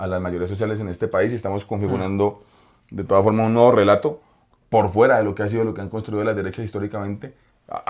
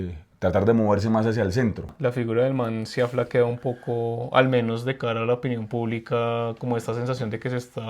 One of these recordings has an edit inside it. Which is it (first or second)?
second